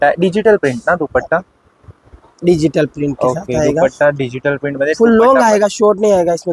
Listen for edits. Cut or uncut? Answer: uncut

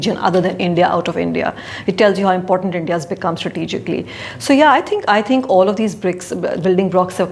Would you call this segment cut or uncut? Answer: uncut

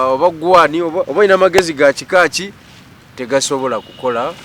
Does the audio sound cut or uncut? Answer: cut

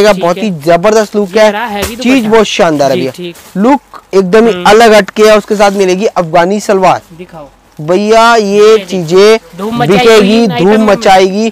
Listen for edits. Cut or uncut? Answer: uncut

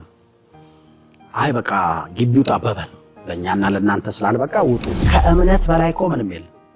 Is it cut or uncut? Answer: cut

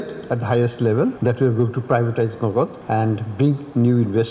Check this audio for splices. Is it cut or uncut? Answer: cut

